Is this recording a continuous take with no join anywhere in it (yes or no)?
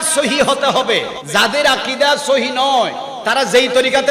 no